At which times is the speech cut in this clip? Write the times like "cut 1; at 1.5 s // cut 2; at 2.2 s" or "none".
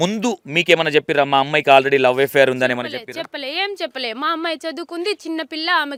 none